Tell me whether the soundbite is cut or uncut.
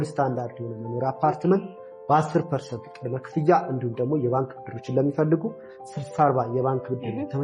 uncut